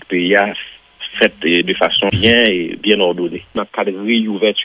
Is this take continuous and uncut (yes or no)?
no